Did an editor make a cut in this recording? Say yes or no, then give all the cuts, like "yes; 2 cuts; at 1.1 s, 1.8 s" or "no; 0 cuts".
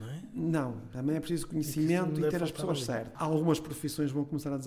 yes; 1 cut; at 3.2 s